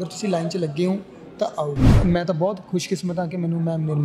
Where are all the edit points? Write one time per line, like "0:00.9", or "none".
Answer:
0:02.0